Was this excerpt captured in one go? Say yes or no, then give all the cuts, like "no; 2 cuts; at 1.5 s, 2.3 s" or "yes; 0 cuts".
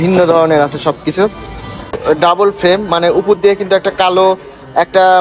no; 1 cut; at 2.0 s